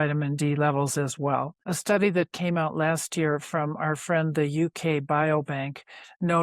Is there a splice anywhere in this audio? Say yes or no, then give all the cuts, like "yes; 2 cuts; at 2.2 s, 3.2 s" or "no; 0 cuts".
yes; 1 cut; at 1.6 s